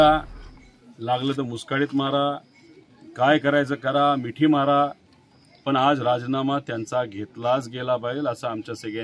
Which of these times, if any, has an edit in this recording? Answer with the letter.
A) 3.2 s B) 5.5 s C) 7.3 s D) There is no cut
D